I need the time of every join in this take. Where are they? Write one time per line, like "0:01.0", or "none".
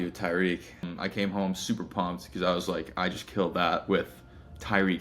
0:00.9